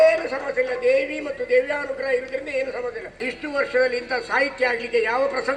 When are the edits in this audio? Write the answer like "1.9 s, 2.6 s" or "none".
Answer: 3.2 s

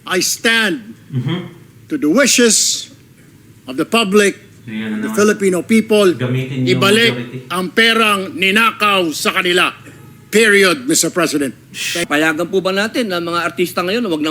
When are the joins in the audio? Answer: 12.0 s

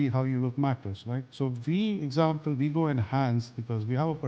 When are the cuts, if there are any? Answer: 1.3 s

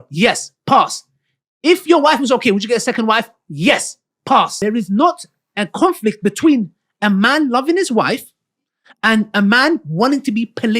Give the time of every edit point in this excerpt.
4.5 s

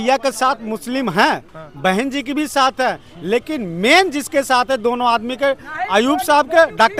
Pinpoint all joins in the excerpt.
none

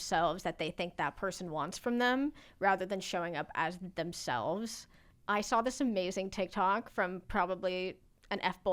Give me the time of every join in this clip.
none

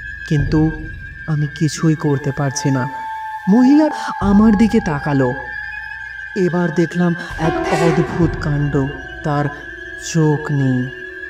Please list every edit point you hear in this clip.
3.9 s

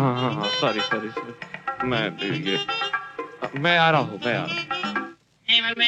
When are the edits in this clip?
none

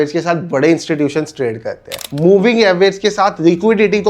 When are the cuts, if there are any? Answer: 2.1 s

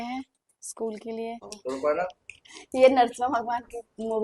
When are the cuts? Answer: 1.5 s

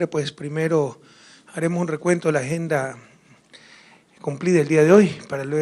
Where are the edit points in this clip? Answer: none

